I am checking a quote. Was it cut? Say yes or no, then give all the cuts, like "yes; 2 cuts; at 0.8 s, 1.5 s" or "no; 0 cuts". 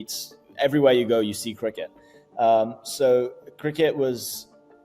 no; 0 cuts